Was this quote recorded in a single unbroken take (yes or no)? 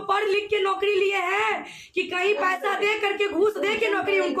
yes